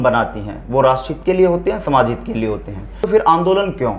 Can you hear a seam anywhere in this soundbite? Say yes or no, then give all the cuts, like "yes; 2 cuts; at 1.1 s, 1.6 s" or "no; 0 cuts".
yes; 1 cut; at 3.1 s